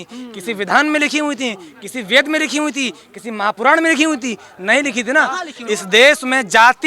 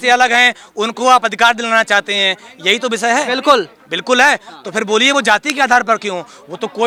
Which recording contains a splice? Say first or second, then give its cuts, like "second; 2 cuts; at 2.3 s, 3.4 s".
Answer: first; 1 cut; at 5.5 s